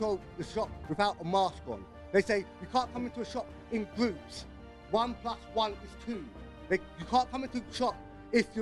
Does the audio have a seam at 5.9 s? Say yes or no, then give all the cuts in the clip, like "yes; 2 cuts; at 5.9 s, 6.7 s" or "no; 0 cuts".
no; 0 cuts